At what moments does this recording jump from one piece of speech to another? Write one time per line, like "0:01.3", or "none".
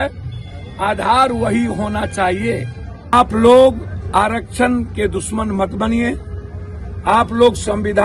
0:03.1